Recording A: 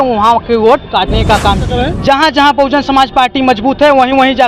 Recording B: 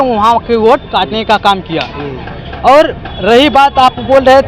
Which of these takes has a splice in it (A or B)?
A